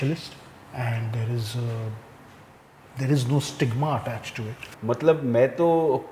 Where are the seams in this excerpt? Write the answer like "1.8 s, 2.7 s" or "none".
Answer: 4.8 s